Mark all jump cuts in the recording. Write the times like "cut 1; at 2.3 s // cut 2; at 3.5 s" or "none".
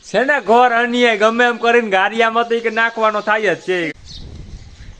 cut 1; at 3.9 s